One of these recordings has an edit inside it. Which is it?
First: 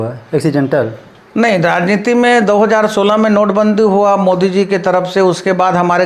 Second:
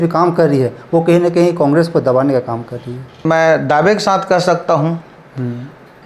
second; 1 cut; at 3.2 s

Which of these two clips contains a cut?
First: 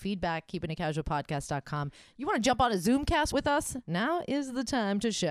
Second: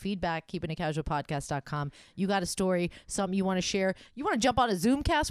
first; 1 cut; at 2.1 s

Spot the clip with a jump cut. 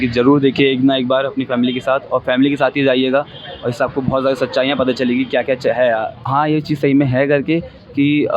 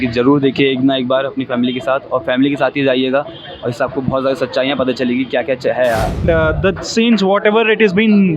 second; 1 cut; at 6.1 s

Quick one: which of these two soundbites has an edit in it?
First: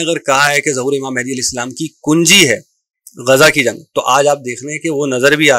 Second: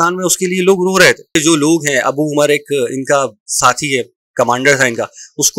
second; 1 cut; at 1.4 s

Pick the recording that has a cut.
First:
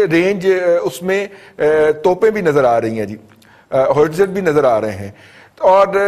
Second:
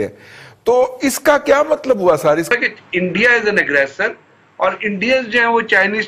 second; 1 cut; at 2.5 s

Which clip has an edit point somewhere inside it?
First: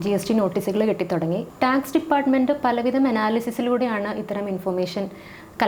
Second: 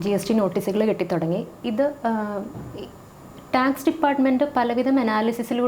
first; 1 cut; at 1.5 s

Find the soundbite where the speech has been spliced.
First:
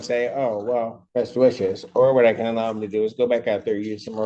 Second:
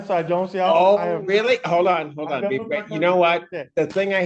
first; 1 cut; at 1.0 s

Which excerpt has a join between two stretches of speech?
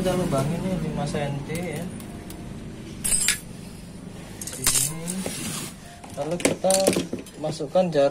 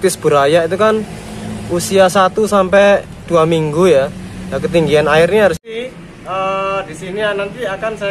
second; 1 cut; at 5.6 s

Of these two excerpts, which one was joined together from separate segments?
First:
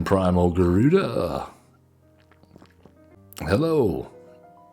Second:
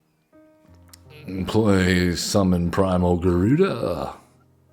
first; 1 cut; at 3.1 s

